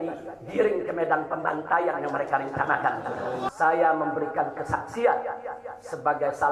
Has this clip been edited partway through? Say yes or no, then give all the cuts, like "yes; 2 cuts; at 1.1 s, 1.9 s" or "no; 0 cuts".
yes; 1 cut; at 3.5 s